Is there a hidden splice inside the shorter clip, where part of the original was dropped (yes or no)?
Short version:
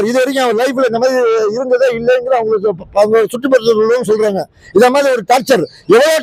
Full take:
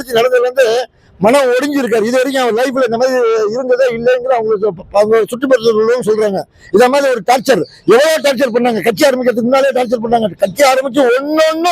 no